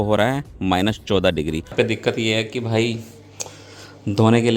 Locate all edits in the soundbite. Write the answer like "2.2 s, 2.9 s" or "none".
1.7 s